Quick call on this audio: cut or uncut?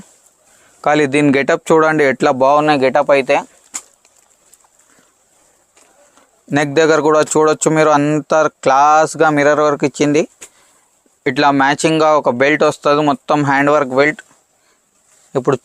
uncut